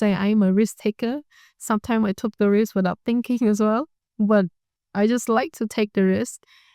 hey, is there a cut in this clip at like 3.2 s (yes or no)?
no